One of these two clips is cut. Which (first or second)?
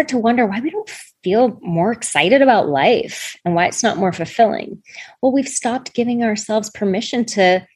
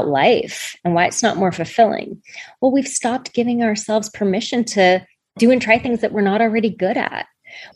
first